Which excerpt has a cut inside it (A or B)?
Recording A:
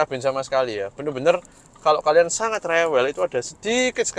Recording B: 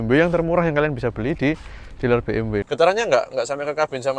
B